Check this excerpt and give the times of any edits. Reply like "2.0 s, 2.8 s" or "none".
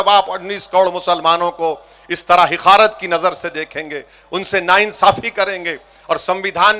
none